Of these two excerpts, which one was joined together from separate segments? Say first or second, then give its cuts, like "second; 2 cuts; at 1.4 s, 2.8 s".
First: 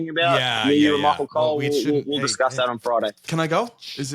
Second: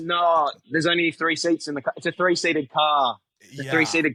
first; 1 cut; at 3.2 s